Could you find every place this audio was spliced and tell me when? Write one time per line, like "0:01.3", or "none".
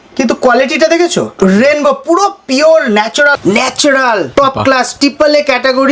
0:01.3
0:03.3
0:04.3